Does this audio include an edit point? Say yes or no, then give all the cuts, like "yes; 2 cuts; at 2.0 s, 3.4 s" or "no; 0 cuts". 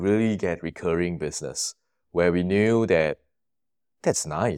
no; 0 cuts